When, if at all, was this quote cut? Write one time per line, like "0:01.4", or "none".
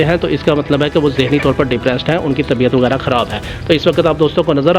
none